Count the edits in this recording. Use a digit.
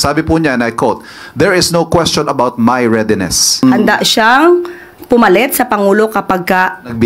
1